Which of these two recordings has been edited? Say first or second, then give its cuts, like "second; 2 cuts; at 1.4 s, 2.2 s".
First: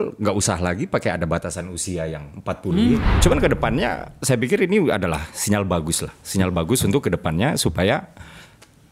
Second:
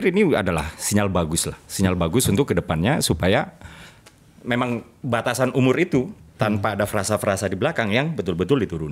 first; 1 cut; at 3.1 s